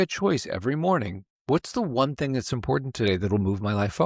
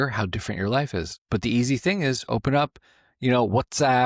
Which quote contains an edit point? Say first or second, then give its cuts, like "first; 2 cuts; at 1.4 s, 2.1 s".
second; 1 cut; at 1.2 s